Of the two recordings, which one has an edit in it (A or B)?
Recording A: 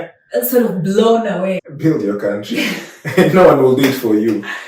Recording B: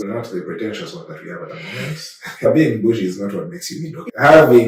A